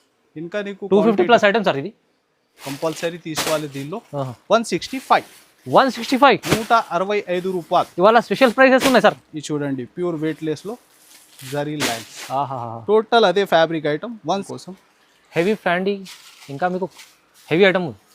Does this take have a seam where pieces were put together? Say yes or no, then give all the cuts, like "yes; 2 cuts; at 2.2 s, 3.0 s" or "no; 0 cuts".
yes; 2 cuts; at 2.6 s, 14.5 s